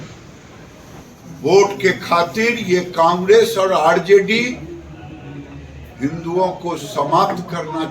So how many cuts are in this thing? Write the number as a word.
one